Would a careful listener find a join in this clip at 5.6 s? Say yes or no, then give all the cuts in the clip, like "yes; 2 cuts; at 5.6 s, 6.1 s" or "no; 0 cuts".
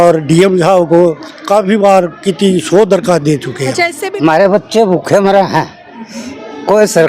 no; 1 cut; at 4.0 s